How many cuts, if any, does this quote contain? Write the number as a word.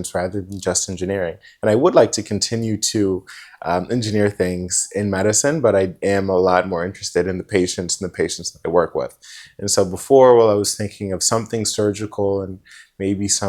zero